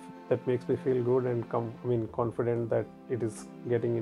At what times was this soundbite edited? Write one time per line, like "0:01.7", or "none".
none